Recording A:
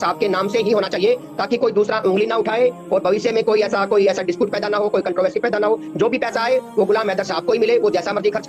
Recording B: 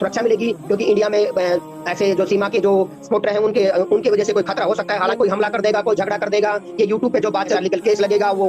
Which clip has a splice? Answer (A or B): B